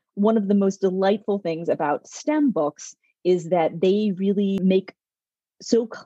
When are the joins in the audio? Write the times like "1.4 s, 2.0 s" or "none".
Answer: 4.6 s